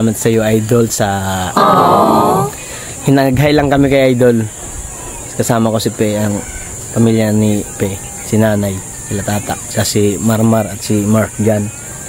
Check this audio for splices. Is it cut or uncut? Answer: cut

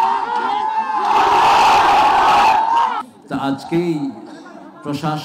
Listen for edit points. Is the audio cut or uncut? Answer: cut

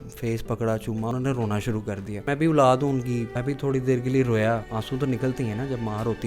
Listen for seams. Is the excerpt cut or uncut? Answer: cut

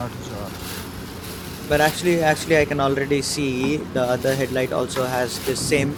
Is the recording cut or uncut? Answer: uncut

